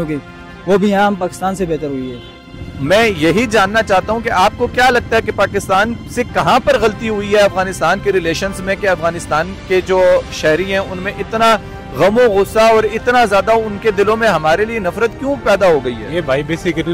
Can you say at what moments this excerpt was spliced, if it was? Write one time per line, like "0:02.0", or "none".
0:02.3